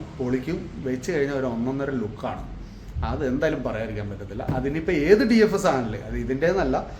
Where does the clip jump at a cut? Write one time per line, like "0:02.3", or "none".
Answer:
none